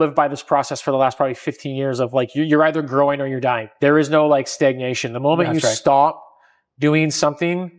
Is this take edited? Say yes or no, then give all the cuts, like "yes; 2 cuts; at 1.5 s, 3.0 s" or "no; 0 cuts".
no; 0 cuts